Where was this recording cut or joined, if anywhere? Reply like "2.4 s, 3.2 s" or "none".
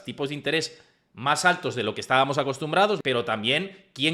3.0 s